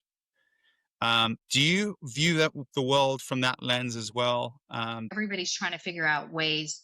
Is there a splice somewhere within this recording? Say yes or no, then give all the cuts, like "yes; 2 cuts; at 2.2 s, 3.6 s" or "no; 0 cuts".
yes; 2 cuts; at 1.4 s, 5.1 s